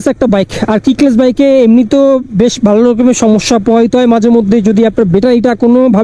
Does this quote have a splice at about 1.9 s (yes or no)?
no